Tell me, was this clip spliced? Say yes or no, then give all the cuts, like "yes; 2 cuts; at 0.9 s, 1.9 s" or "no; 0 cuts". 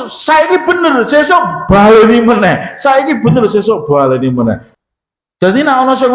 yes; 1 cut; at 4.7 s